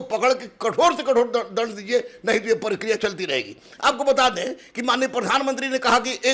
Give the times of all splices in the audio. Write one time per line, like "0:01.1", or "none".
none